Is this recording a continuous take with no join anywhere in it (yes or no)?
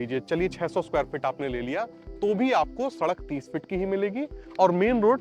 yes